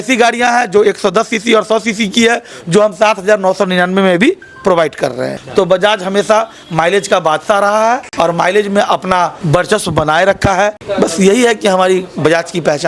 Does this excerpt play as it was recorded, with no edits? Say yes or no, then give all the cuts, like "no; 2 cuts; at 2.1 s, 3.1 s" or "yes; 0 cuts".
no; 4 cuts; at 5.3 s, 8.1 s, 9.4 s, 10.8 s